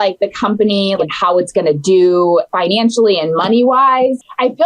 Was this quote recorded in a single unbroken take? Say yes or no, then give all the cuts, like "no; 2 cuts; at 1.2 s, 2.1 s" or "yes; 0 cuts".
no; 2 cuts; at 1.0 s, 2.5 s